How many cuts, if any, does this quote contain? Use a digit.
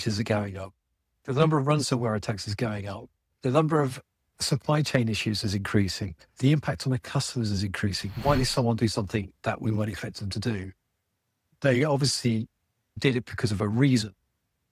4